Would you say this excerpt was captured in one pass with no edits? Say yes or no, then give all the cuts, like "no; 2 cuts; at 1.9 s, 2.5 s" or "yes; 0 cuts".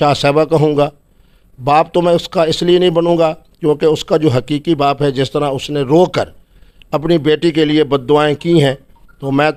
yes; 0 cuts